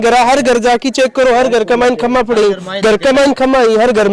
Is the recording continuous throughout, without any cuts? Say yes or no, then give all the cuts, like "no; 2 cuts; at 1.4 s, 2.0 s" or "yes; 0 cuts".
yes; 0 cuts